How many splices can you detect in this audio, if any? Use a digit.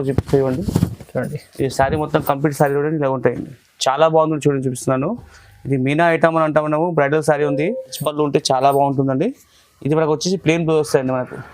1